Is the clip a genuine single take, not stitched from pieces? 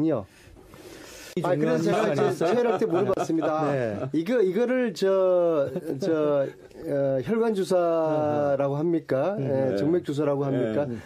yes; 0 cuts

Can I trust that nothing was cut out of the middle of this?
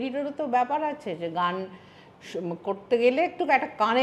yes; 0 cuts

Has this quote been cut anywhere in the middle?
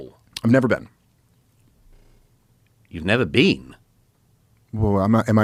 no; 0 cuts

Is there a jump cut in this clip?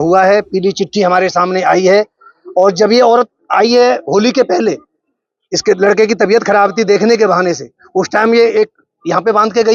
no; 0 cuts

